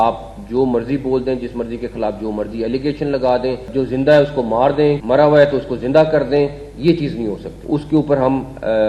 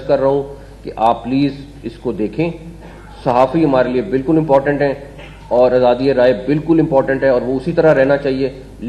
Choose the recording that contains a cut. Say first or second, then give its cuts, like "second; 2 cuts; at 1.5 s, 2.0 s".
first; 3 cuts; at 3.7 s, 5.0 s, 7.5 s